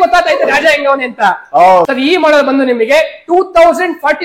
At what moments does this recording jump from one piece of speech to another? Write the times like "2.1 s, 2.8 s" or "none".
1.9 s